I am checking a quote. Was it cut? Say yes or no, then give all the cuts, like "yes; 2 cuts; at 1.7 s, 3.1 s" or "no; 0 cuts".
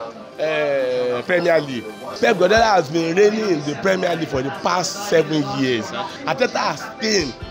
yes; 2 cuts; at 2.1 s, 6.2 s